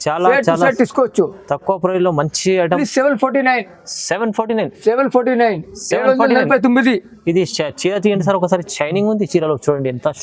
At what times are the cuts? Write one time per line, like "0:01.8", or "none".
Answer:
0:02.8